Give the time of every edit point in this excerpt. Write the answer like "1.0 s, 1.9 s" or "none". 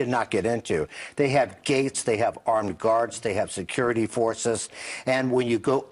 2.6 s